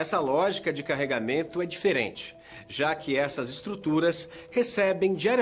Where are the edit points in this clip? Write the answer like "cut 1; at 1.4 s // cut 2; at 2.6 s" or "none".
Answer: cut 1; at 2.8 s

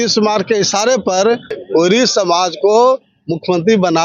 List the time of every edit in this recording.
cut 1; at 1.6 s

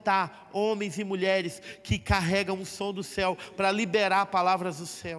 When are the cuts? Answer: none

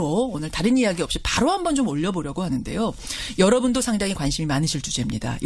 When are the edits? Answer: cut 1; at 1.6 s

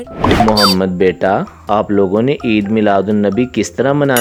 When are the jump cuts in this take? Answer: none

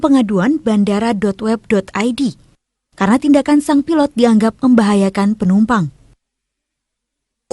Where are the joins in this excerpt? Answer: cut 1; at 4.9 s

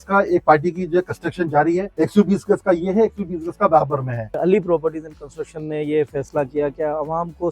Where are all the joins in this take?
cut 1; at 1.9 s // cut 2; at 4.4 s

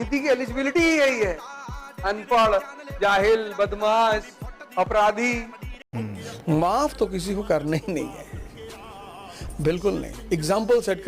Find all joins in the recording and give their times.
cut 1; at 5.7 s

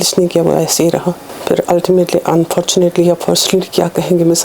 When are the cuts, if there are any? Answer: cut 1; at 1.3 s

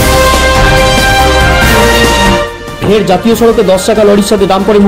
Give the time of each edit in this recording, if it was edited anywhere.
none

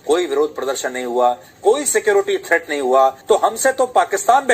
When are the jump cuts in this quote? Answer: cut 1; at 3.2 s

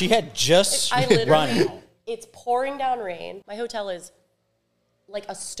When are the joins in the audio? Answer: cut 1; at 3.4 s

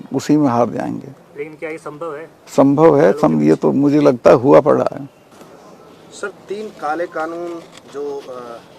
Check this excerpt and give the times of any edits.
cut 1; at 5.5 s

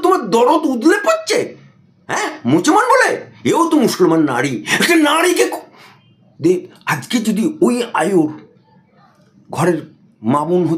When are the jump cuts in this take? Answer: none

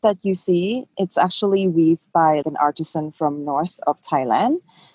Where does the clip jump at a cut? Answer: cut 1; at 0.9 s

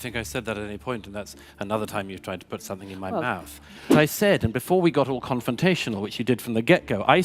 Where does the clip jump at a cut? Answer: cut 1; at 3.8 s

